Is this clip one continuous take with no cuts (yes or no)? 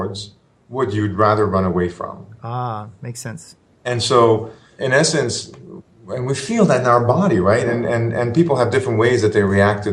yes